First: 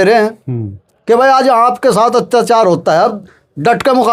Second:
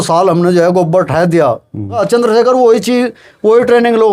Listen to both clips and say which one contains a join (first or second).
second